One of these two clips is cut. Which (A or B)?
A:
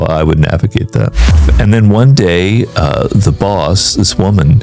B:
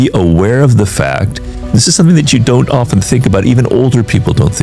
A